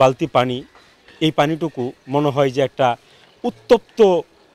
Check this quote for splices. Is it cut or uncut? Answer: uncut